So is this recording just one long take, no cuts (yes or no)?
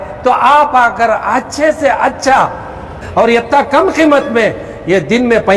no